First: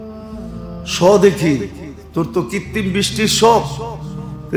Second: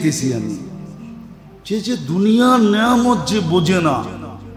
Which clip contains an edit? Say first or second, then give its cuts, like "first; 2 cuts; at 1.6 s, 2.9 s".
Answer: first; 1 cut; at 1.0 s